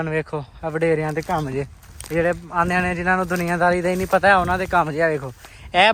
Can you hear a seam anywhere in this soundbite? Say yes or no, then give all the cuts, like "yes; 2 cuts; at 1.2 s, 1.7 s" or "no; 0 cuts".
no; 0 cuts